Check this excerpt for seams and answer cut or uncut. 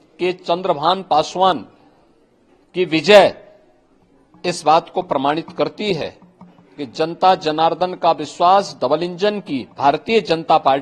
uncut